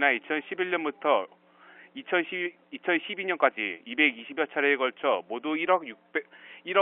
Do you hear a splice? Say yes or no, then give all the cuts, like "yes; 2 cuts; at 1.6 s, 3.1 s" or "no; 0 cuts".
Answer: yes; 1 cut; at 3.9 s